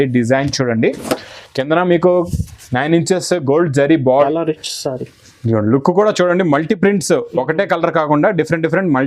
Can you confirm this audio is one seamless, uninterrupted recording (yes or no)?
no